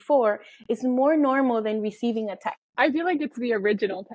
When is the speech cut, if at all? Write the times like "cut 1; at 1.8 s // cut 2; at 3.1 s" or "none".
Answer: cut 1; at 2.6 s